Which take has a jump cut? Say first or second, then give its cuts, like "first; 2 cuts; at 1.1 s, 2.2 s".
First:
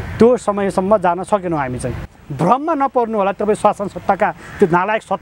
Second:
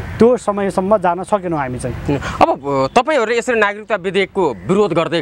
first; 1 cut; at 2.0 s